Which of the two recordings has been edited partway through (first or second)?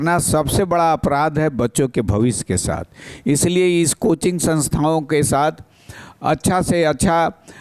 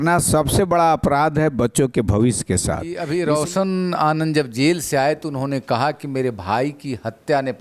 second